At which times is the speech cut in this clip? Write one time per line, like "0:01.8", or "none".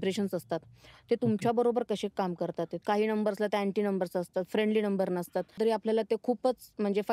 0:02.7
0:05.5